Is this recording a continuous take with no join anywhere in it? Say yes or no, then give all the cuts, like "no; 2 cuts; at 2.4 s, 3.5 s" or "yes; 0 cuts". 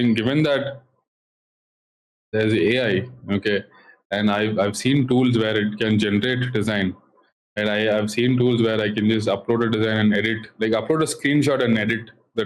yes; 0 cuts